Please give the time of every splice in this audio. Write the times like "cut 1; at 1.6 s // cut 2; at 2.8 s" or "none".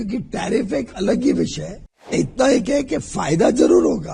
cut 1; at 2.1 s